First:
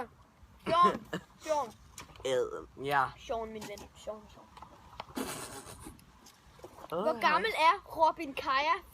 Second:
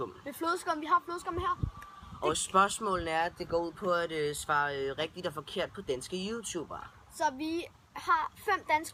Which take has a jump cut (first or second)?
first